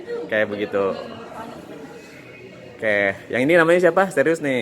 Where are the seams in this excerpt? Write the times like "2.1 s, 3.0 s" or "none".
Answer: 1.5 s